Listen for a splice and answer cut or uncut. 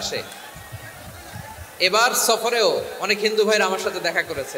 uncut